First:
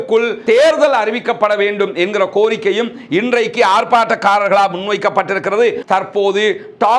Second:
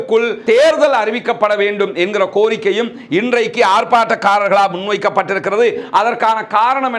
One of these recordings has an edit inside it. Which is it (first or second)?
first